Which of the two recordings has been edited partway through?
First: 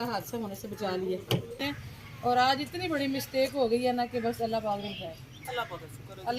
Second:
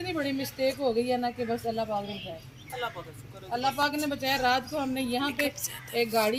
first; 1 cut; at 1.6 s

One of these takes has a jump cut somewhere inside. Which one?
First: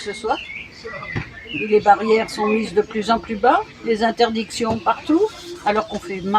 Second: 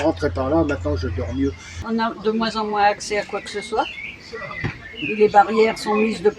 second; 1 cut; at 1.8 s

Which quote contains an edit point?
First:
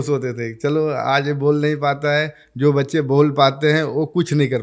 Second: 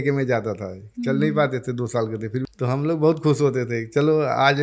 second; 1 cut; at 2.3 s

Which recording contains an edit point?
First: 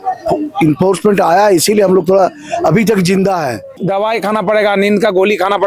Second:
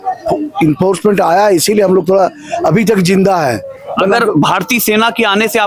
first; 1 cut; at 3.7 s

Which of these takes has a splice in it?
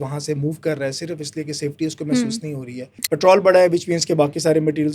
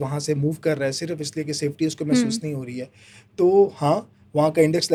first; 1 cut; at 3.0 s

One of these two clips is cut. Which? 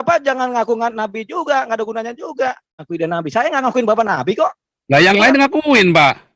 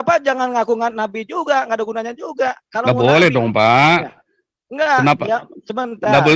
first; 1 cut; at 2.7 s

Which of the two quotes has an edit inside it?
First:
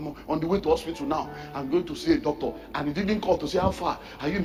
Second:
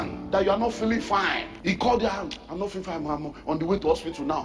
second; 1 cut; at 1.5 s

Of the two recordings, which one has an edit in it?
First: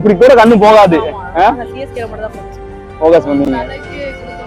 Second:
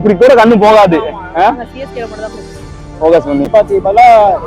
second; 1 cut; at 3.5 s

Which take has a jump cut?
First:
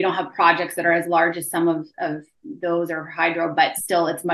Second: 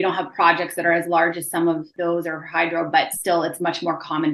second; 1 cut; at 1.9 s

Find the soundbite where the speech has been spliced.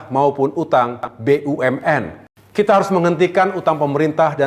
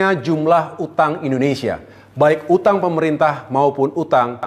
first; 1 cut; at 2.4 s

